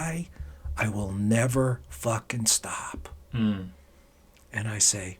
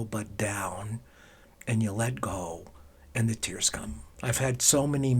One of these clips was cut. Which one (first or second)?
second